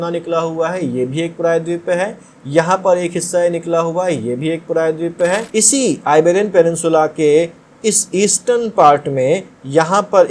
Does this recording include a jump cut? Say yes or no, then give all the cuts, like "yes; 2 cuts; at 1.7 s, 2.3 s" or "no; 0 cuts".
yes; 1 cut; at 5.5 s